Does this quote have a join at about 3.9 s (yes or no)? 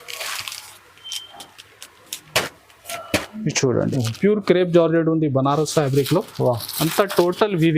yes